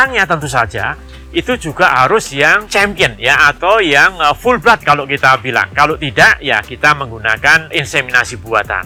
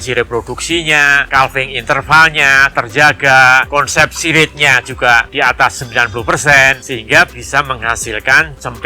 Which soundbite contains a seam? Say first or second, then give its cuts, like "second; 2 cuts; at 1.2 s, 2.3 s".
second; 3 cuts; at 1.2 s, 3.7 s, 6.8 s